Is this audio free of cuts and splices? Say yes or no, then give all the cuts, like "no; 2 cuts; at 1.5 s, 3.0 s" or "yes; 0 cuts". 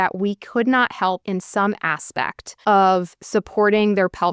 no; 2 cuts; at 1.2 s, 2.4 s